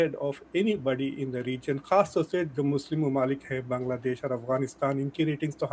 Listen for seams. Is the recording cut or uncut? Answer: uncut